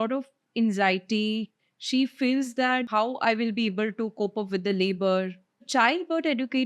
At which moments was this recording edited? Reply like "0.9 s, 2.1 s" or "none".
1.5 s, 2.9 s, 5.7 s